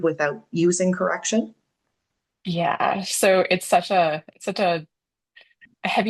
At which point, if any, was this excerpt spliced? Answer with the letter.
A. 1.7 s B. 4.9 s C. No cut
C